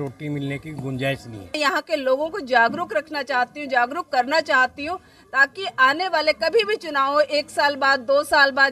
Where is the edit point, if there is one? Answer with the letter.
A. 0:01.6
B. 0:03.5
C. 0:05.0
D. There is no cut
A